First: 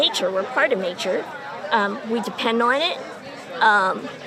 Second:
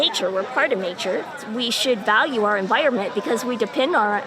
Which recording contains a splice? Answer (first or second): second